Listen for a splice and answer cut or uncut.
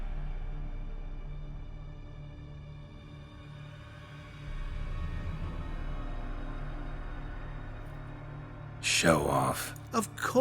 cut